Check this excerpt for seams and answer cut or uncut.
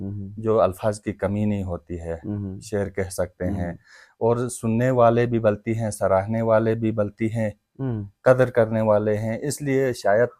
uncut